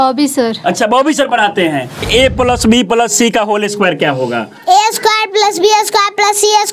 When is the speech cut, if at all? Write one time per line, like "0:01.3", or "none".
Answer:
0:02.0